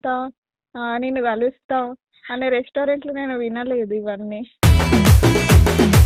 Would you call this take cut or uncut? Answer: uncut